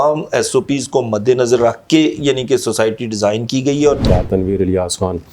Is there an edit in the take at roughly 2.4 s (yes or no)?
no